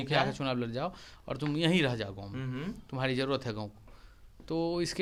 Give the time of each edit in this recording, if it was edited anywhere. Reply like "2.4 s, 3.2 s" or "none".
none